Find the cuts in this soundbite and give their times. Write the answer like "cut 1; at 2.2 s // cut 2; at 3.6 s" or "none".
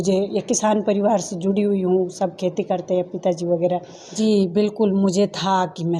cut 1; at 4.2 s